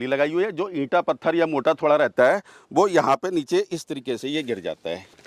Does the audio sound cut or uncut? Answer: uncut